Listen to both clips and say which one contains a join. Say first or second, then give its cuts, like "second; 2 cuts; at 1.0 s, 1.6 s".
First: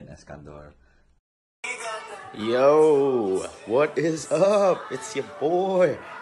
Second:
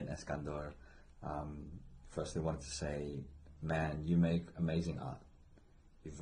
first; 1 cut; at 1.0 s